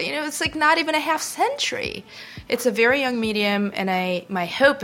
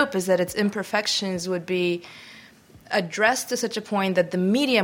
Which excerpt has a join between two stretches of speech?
first; 1 cut; at 2.1 s

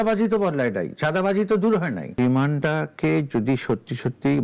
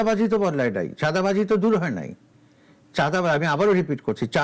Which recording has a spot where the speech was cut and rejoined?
first; 1 cut; at 2.5 s

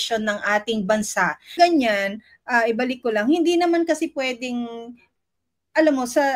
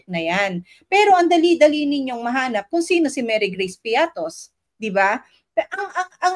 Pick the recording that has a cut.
first; 1 cut; at 1.5 s

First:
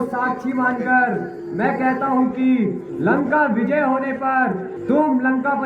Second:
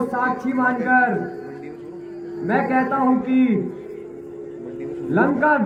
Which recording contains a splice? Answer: first; 3 cuts; at 1.4 s, 2.9 s, 4.7 s

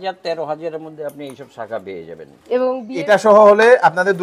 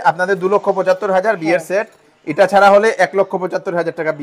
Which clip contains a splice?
first; 1 cut; at 2.9 s

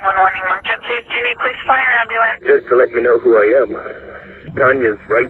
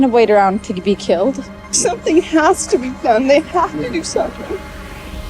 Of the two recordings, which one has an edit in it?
second; 1 cut; at 1.6 s

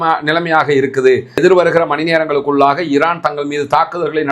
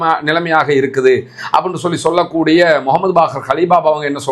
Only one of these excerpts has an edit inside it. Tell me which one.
first; 1 cut; at 1.4 s

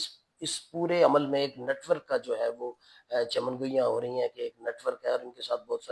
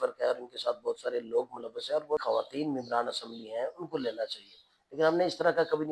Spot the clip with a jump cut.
second; 1 cut; at 2.2 s

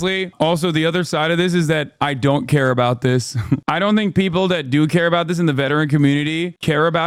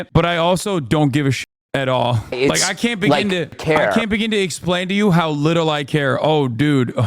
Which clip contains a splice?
second; 1 cut; at 2.9 s

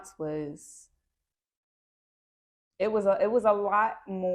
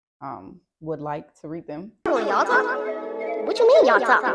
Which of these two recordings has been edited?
second; 1 cut; at 1.9 s

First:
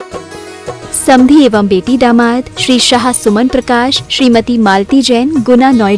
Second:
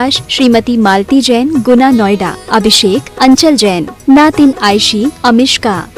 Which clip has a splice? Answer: first; 1 cut; at 1.1 s

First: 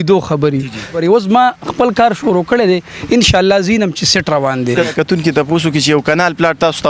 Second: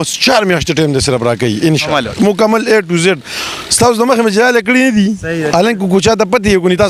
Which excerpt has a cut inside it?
first; 2 cuts; at 1.0 s, 4.9 s

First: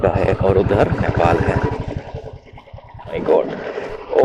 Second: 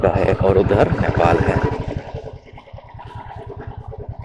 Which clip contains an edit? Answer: first; 1 cut; at 3.2 s

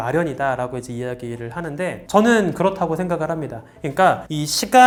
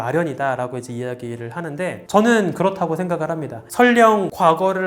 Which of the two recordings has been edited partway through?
second; 1 cut; at 3.6 s

